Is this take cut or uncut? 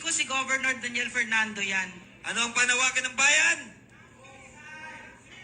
cut